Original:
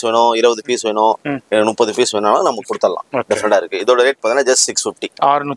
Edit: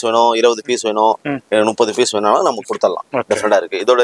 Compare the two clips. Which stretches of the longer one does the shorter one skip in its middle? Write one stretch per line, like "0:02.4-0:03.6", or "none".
none